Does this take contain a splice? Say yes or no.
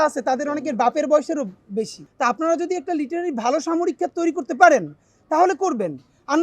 yes